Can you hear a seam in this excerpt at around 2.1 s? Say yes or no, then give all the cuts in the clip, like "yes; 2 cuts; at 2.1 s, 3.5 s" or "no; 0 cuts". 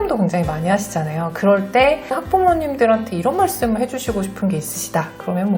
yes; 1 cut; at 2.1 s